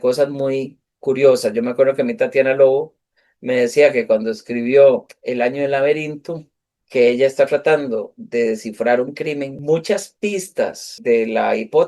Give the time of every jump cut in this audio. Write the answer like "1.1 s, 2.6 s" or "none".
9.6 s, 11.0 s

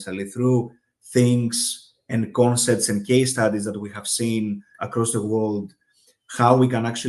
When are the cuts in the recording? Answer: none

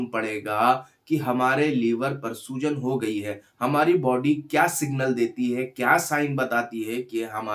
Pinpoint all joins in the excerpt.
none

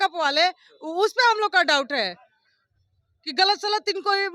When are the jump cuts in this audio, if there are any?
none

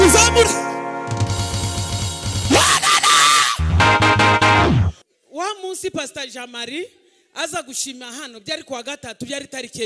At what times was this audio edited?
5.0 s

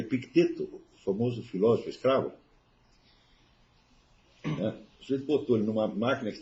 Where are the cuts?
none

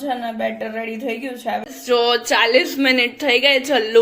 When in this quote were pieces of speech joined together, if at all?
1.9 s

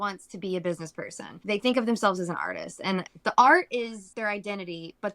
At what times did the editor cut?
1.4 s, 3.1 s, 4.0 s

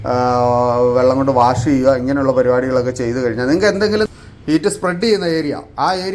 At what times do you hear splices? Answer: 4.1 s

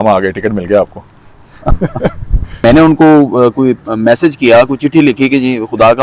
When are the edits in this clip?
2.6 s

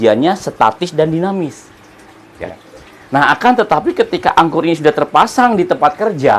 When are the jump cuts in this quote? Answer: 2.5 s

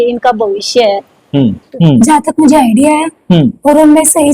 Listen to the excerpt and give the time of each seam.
1.7 s

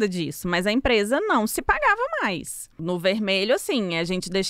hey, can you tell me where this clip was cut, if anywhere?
2.8 s

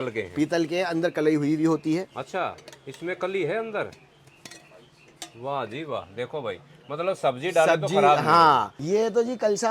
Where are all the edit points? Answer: 8.7 s

